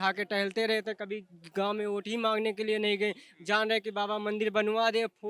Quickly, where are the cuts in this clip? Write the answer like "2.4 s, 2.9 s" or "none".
none